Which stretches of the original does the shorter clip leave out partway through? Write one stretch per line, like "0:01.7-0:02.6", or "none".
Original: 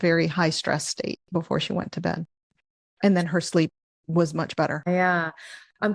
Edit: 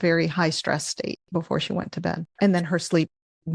0:02.3-0:02.9